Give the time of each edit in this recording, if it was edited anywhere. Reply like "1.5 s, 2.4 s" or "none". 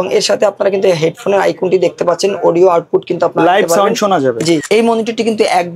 4.6 s